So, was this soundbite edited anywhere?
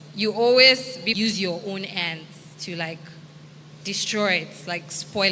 yes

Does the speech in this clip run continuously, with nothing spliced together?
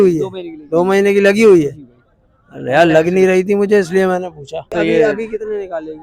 no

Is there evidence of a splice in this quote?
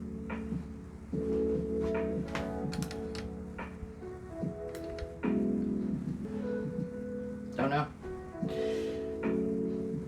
yes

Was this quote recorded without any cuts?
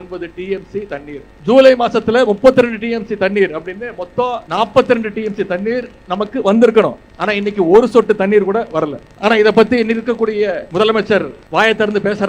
no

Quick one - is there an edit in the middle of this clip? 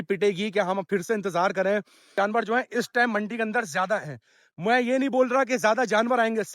yes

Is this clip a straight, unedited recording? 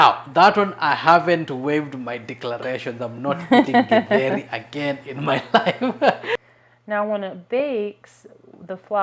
no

